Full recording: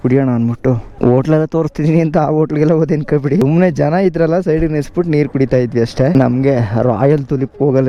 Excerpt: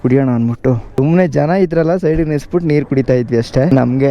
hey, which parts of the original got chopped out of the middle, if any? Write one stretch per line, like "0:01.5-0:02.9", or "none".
0:01.0-0:03.4